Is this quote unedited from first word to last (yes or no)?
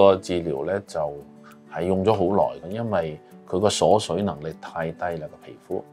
yes